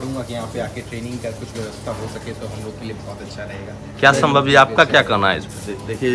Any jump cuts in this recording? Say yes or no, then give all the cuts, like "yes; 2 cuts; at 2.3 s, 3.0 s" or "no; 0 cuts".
no; 0 cuts